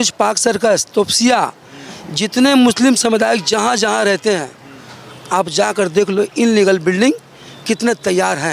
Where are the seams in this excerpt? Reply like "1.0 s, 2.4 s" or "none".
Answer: none